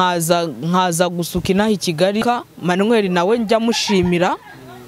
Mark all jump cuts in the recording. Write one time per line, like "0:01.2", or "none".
0:02.2